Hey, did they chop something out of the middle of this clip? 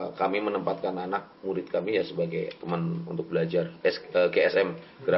no; 0 cuts

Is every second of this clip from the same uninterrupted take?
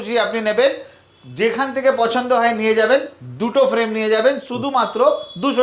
yes; 0 cuts

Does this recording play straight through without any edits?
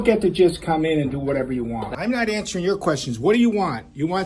no; 1 cut; at 1.9 s

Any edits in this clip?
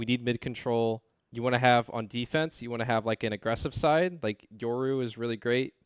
yes; 1 cut; at 1.2 s

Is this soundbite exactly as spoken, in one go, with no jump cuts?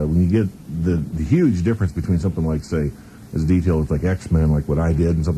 yes; 0 cuts

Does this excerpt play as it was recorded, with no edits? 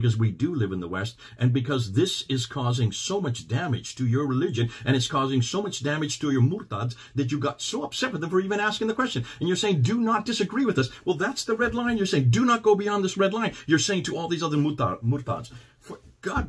yes; 0 cuts

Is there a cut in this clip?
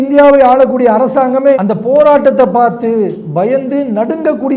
no; 0 cuts

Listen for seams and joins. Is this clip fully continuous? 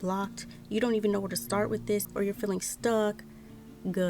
no; 1 cut; at 2.0 s

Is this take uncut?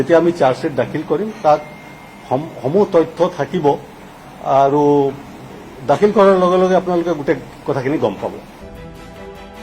no; 1 cut; at 8.5 s

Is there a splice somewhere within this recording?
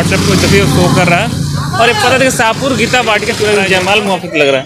yes; 1 cut; at 3.4 s

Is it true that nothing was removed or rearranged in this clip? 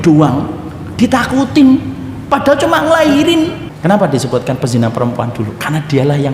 no; 1 cut; at 3.7 s

